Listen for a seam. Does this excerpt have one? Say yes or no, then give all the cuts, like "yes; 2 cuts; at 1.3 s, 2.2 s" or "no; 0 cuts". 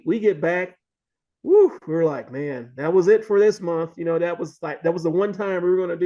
no; 0 cuts